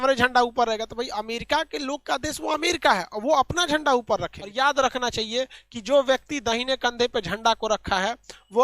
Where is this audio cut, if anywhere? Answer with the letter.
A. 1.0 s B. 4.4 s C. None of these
B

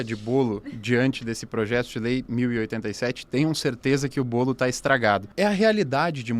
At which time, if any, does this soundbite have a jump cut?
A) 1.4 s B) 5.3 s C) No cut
B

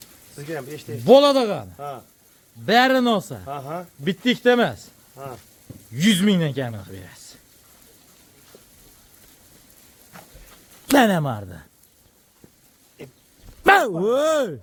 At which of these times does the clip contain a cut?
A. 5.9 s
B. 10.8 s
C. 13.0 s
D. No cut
D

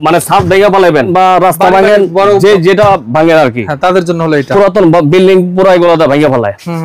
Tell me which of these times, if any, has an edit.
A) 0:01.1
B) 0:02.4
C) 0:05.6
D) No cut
A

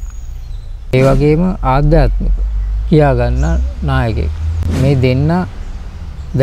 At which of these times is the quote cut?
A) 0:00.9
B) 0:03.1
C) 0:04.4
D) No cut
A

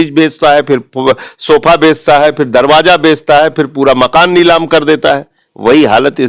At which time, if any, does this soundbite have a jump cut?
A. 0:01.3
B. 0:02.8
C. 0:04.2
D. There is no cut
D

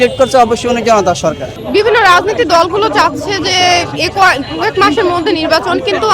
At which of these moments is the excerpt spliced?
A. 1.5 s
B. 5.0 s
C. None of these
A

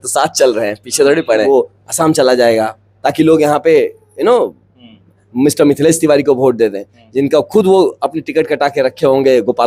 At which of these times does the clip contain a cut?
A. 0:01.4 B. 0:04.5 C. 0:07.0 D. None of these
A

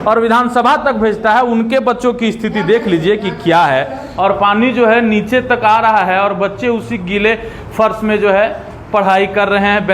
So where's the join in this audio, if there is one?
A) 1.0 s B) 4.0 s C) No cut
B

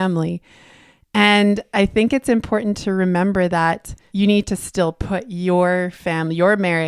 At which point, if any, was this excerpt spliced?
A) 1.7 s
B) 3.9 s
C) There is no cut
B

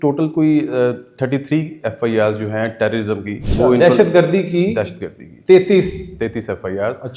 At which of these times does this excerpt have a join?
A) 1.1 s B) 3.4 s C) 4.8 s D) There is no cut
B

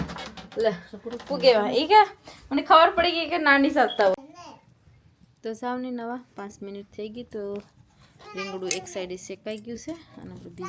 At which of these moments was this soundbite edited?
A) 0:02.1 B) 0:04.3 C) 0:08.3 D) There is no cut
B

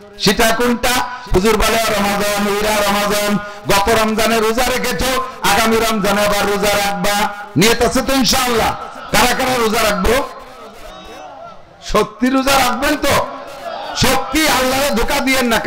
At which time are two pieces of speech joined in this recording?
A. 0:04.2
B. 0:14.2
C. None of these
C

